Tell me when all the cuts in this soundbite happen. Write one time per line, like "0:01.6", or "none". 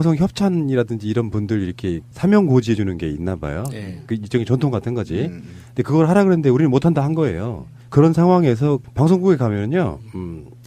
0:03.4